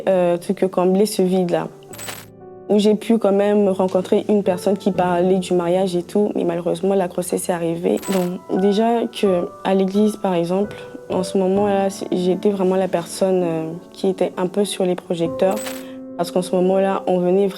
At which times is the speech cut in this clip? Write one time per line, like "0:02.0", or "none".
0:01.8
0:08.0